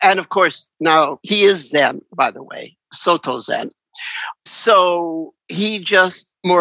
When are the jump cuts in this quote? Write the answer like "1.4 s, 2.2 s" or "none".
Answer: 1.2 s, 4.5 s